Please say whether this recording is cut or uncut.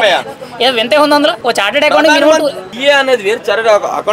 cut